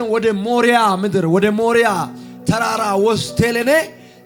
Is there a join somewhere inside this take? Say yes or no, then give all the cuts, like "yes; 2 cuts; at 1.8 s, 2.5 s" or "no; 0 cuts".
no; 0 cuts